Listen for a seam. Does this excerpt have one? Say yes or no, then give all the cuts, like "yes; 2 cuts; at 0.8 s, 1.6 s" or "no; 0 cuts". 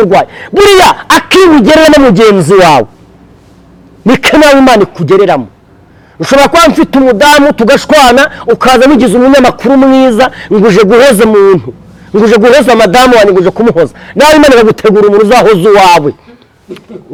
no; 0 cuts